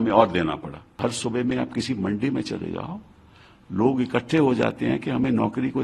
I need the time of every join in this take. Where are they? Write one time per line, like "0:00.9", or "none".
0:00.9